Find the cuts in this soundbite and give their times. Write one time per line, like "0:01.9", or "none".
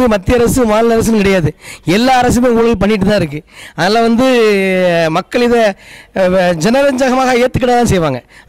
none